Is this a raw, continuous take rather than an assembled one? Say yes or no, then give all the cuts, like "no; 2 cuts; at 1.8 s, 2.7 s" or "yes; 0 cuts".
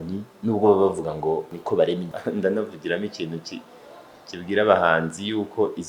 no; 2 cuts; at 1.6 s, 2.1 s